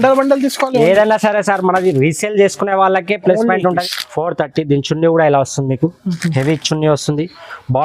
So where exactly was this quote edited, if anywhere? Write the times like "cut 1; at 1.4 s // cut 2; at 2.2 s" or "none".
cut 1; at 3.8 s